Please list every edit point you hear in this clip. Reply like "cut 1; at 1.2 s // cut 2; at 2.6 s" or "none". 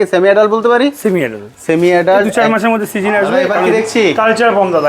cut 1; at 3.6 s